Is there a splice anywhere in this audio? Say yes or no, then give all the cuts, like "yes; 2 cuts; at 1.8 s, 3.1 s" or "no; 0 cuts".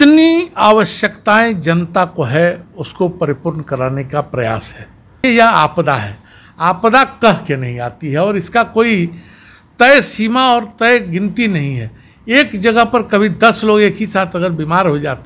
yes; 1 cut; at 5.2 s